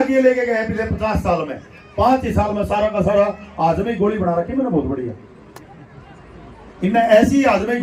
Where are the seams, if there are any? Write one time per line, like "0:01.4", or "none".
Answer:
none